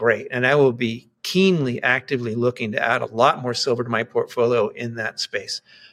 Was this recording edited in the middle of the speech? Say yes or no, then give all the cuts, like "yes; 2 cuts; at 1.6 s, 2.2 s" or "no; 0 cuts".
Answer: no; 0 cuts